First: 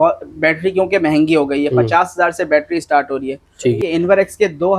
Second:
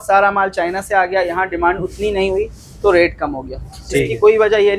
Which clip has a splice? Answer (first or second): first